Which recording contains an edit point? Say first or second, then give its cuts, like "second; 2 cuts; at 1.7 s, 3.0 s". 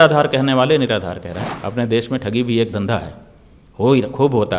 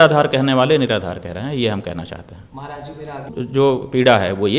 first; 1 cut; at 1.3 s